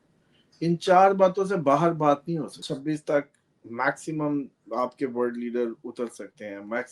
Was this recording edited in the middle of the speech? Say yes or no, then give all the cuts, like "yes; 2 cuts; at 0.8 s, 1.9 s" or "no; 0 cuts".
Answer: yes; 1 cut; at 2.6 s